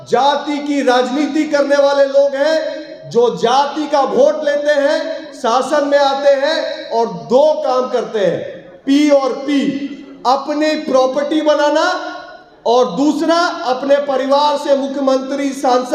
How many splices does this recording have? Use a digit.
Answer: 0